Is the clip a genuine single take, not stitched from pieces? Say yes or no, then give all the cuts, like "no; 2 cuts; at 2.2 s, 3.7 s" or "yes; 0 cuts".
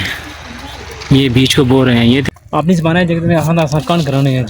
no; 1 cut; at 2.3 s